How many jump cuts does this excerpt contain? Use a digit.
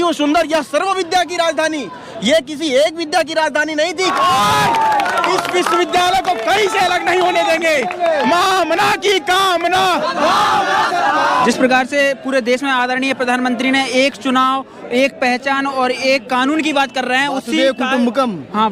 2